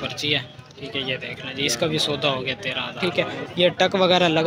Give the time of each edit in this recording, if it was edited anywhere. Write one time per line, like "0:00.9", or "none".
0:03.0